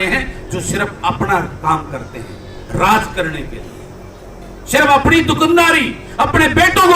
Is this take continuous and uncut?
yes; 0 cuts

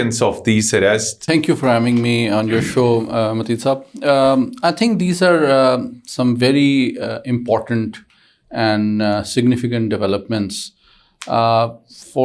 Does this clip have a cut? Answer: no; 0 cuts

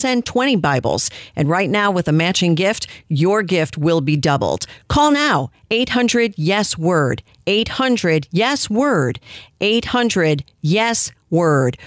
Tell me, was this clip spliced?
no; 0 cuts

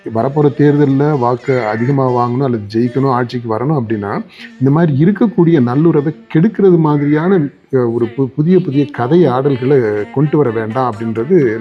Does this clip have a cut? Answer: no; 0 cuts

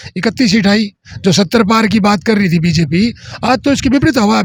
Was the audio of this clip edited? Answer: no; 0 cuts

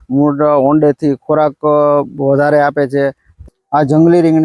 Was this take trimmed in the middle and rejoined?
yes; 1 cut; at 3.3 s

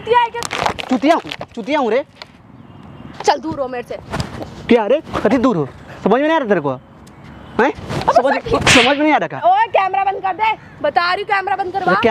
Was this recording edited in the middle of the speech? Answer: yes; 2 cuts; at 3.0 s, 9.4 s

